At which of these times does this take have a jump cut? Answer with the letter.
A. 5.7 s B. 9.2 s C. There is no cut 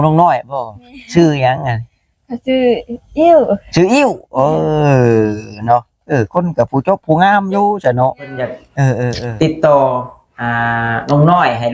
B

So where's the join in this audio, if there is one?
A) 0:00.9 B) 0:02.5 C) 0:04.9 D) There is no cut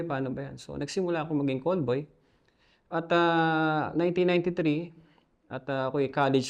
D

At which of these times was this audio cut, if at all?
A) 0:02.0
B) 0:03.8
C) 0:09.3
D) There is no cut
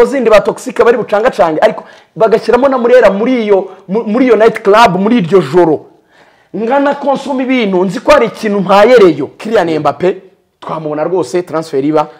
C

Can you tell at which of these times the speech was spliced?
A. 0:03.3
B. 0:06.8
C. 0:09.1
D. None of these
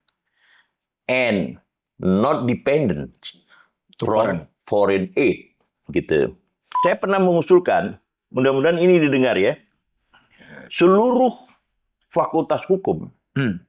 B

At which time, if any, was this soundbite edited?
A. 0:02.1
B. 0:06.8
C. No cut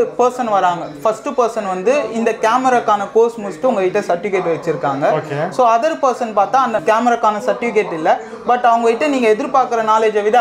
B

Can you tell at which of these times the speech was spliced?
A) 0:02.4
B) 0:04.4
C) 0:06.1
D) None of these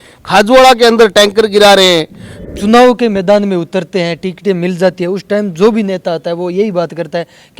A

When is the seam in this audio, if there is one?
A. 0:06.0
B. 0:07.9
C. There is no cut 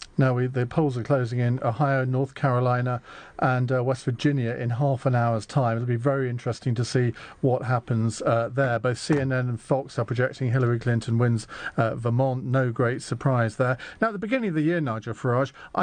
A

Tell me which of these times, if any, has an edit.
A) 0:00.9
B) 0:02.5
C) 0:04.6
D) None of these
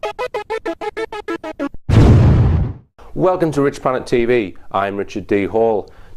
B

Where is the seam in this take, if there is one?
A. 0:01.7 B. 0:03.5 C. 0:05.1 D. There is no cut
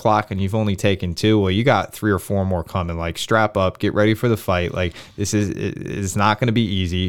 D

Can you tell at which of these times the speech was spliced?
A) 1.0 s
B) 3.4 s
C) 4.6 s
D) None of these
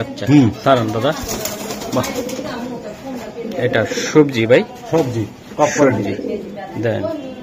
D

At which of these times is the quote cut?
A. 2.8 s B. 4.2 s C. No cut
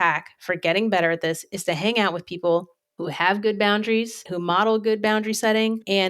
B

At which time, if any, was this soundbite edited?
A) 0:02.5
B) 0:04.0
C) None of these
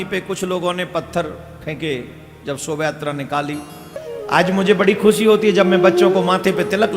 B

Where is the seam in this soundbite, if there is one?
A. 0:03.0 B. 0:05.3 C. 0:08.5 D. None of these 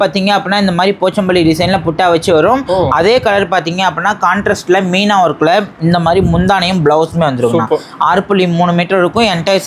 D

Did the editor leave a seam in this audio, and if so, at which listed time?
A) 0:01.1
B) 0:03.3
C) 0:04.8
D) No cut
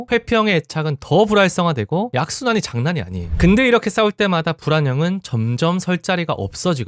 B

